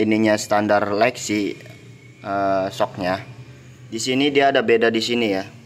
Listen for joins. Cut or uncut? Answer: uncut